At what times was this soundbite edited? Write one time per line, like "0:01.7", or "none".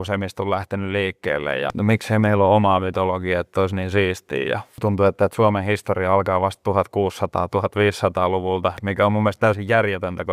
0:01.7
0:04.7